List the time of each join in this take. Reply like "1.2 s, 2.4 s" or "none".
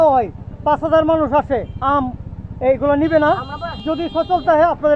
3.8 s

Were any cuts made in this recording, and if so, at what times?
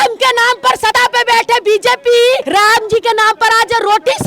0.9 s, 2.4 s

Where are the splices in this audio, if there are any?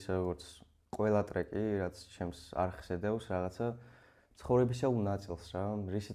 none

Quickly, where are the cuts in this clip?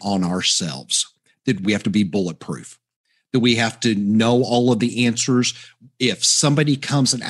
1.6 s

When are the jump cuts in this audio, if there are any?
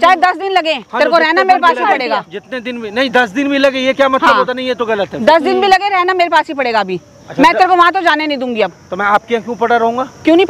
none

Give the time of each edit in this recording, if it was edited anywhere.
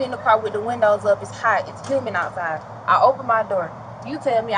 none

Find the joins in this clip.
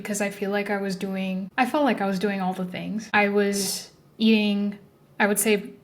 1.5 s, 3.0 s

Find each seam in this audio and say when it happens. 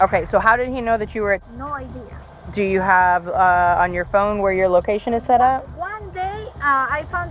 none

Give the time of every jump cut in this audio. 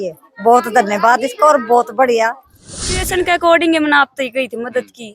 3.0 s

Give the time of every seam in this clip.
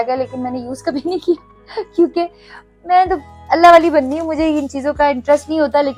none

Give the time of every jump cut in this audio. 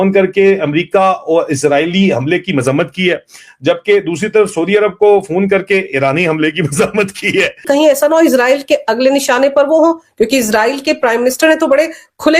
7.7 s

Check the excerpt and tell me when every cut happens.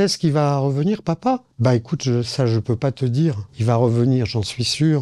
none

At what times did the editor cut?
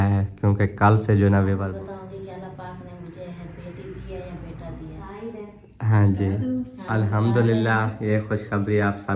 1.7 s, 5.0 s

